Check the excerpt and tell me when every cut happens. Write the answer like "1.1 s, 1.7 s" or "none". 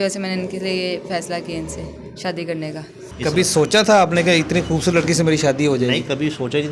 3.0 s